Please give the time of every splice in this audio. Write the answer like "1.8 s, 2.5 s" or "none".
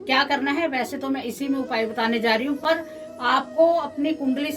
none